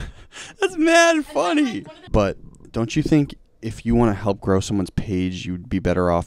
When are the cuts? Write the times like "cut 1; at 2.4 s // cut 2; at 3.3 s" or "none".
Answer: cut 1; at 1.9 s